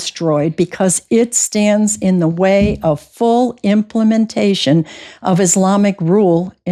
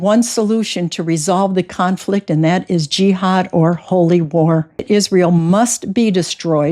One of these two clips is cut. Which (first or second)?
second